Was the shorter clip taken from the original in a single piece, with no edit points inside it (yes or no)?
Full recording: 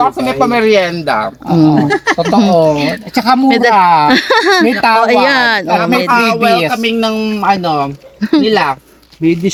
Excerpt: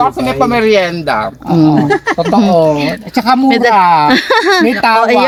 yes